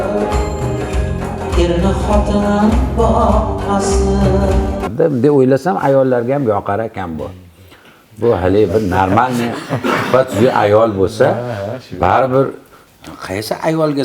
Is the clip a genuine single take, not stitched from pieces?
no; 1 cut; at 4.9 s

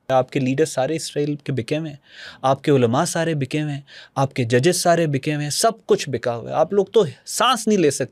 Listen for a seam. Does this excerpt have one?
no; 0 cuts

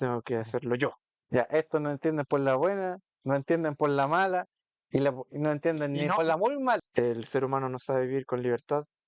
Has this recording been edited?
yes; 1 cut; at 6.8 s

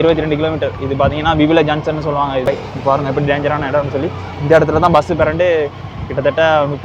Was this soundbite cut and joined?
yes; 1 cut; at 2.4 s

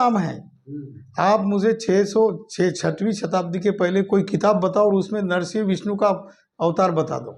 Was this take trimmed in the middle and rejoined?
no; 0 cuts

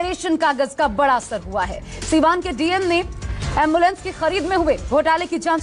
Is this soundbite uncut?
yes; 0 cuts

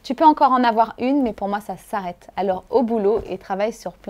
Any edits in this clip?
no; 0 cuts

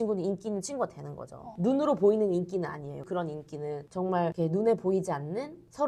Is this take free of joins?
yes; 0 cuts

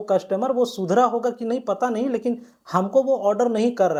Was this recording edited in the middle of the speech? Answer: no; 0 cuts

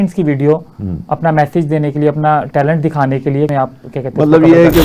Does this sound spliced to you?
yes; 1 cut; at 3.5 s

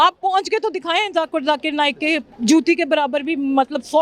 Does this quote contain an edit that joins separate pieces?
yes; 1 cut; at 2.3 s

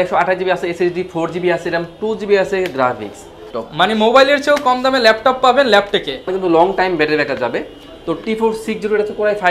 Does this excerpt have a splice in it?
yes; 2 cuts; at 3.6 s, 6.3 s

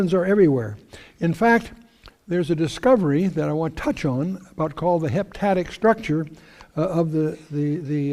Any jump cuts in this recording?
yes; 1 cut; at 5.9 s

